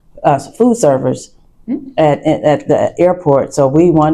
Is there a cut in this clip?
no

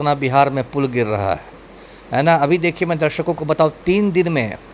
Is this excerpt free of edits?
yes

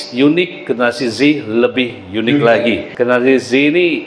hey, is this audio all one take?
no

